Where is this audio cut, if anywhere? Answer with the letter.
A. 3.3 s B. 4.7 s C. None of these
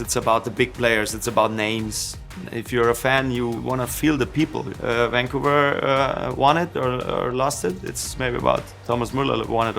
B